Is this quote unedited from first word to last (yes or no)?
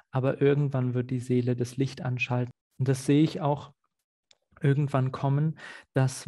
no